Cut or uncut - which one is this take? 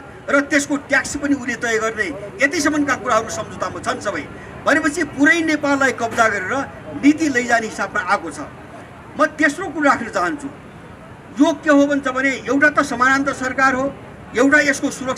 uncut